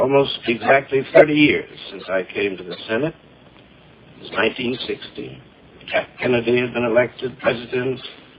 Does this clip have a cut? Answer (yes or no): yes